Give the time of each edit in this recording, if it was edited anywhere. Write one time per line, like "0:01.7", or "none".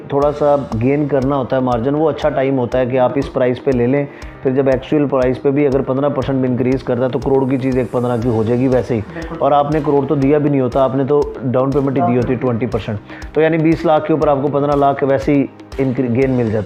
none